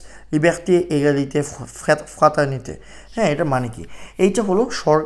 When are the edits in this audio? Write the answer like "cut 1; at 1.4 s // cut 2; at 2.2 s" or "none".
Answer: none